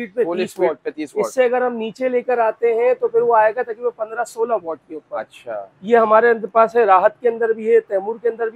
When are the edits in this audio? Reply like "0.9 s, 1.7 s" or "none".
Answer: none